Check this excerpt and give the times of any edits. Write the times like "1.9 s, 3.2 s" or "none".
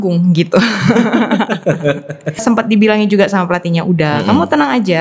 2.4 s